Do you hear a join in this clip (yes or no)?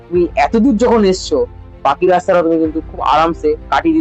no